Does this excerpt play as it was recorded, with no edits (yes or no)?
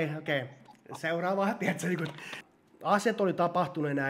no